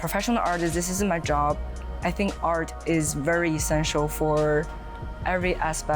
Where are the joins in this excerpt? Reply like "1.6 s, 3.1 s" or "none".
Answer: none